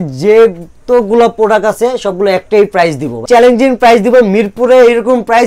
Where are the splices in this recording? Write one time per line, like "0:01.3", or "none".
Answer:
0:03.2